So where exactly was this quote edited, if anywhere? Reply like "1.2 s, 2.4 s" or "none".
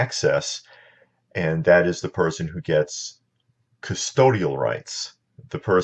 2.7 s